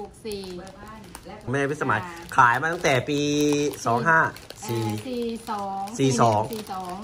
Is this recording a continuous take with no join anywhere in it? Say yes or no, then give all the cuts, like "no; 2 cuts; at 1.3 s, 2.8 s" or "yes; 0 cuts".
no; 1 cut; at 1.5 s